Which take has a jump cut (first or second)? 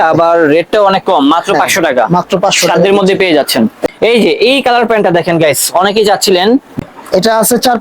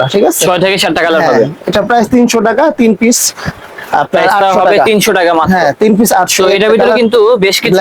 first